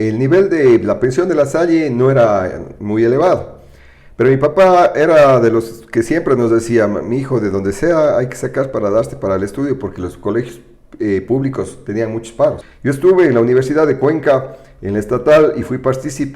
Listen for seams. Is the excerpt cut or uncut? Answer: cut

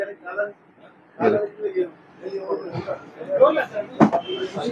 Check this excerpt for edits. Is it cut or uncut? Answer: uncut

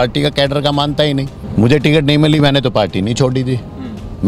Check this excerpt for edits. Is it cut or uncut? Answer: cut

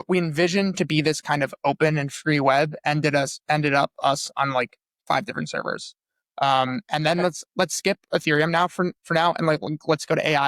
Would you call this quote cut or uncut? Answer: uncut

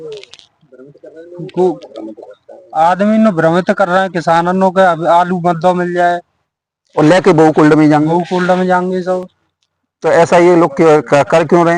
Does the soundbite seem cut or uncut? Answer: uncut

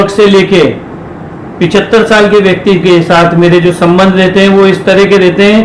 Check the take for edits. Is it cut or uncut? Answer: uncut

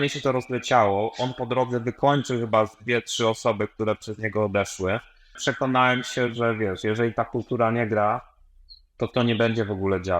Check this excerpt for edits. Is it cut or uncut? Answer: cut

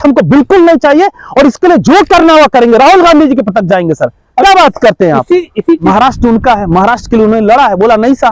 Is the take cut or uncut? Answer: cut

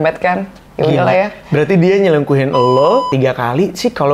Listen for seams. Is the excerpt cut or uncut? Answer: cut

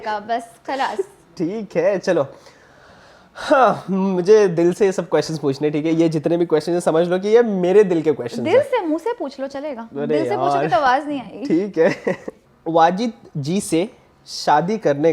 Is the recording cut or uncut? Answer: uncut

